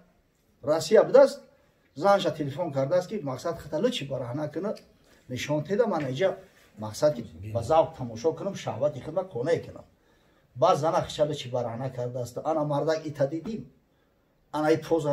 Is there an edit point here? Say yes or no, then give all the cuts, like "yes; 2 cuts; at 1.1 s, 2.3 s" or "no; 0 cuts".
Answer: no; 0 cuts